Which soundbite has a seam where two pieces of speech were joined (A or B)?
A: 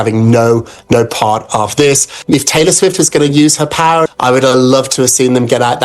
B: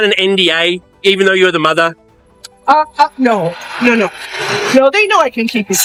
A